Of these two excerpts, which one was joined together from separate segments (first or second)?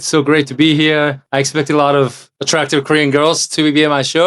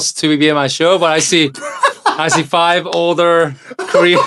first